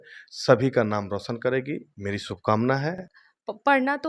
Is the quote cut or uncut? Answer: cut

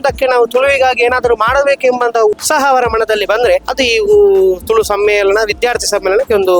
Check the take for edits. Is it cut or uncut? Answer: cut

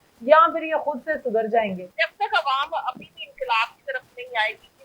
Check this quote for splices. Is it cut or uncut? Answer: cut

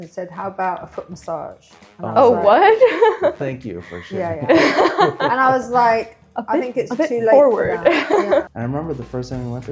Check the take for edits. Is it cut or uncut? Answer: cut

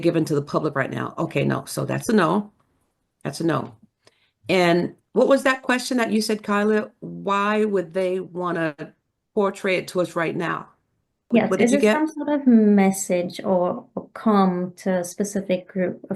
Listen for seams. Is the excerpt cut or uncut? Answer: cut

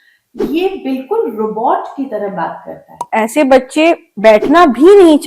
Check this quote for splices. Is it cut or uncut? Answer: cut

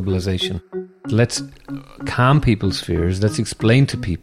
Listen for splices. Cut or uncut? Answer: cut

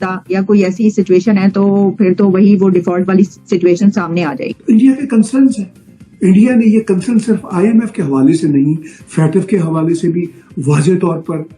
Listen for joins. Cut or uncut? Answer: cut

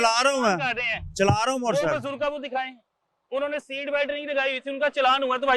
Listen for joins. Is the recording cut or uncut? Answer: uncut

